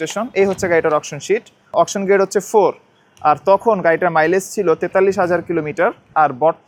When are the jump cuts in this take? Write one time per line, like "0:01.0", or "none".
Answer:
none

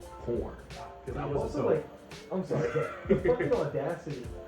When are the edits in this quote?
0:01.0

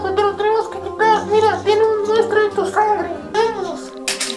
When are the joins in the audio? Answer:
0:03.3

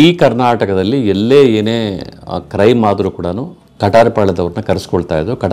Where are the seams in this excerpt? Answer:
none

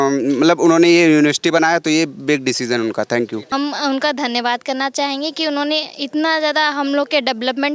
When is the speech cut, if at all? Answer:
0:03.5

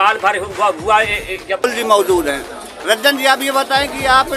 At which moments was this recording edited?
0:01.6

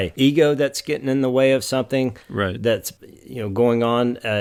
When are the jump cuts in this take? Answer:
none

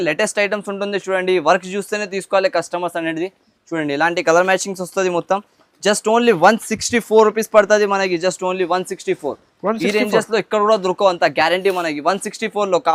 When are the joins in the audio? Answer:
none

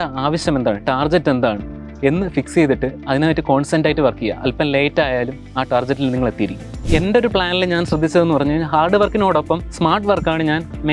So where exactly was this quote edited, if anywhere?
0:06.8

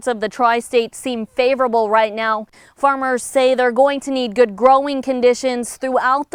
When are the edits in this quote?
none

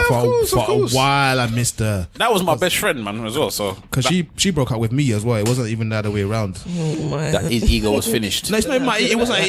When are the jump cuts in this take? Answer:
none

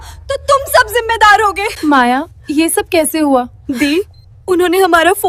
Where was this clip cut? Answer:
0:01.7
0:02.4
0:03.6

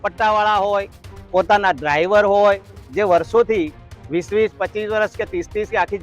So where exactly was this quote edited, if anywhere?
0:02.8

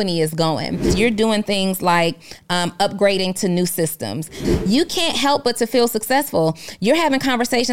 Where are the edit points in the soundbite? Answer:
0:00.9
0:04.5

